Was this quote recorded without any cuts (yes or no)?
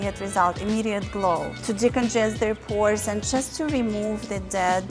yes